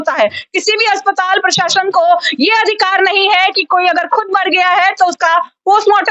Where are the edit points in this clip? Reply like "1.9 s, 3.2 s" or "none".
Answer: none